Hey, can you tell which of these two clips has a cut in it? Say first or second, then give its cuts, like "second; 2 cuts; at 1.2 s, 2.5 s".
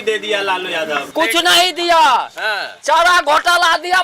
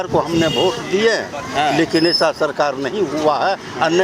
first; 1 cut; at 1.0 s